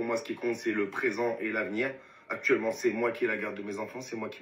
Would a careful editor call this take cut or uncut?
uncut